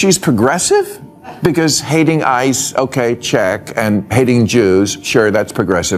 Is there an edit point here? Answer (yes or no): no